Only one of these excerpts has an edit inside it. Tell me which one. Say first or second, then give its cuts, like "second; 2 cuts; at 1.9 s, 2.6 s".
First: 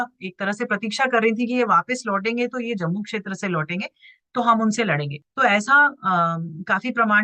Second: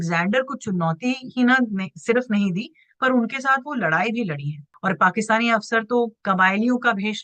second; 2 cuts; at 4.7 s, 6.2 s